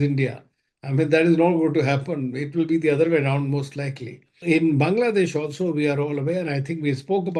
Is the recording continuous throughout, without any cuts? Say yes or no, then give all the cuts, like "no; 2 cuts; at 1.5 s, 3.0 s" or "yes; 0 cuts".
no; 1 cut; at 4.3 s